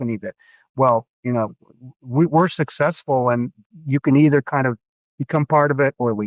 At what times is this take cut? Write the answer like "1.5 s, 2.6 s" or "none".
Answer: 3.6 s